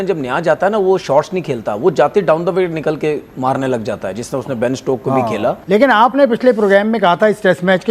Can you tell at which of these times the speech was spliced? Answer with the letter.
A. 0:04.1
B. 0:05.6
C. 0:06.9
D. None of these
B